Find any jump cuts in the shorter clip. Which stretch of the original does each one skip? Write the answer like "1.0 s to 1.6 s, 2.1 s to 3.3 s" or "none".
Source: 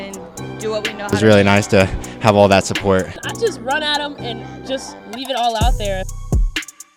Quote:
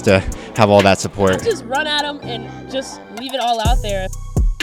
3.1 s to 3.4 s